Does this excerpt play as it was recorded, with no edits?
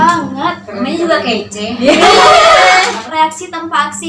no; 1 cut; at 3.0 s

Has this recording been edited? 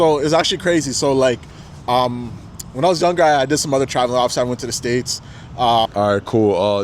yes; 1 cut; at 5.9 s

